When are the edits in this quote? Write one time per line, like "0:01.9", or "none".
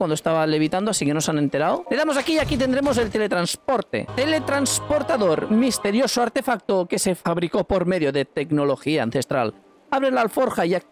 0:01.8
0:04.1